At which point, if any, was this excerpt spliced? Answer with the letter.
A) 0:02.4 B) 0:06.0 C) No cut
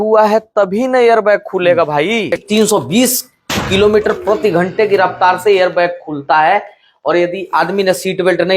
A